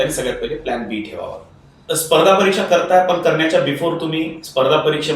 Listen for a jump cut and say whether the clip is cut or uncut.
cut